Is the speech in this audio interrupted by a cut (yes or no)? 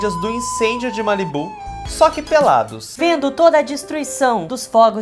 no